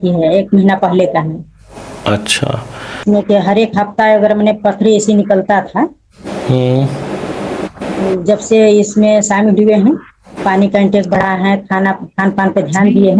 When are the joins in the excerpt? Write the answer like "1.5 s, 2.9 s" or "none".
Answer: 2.9 s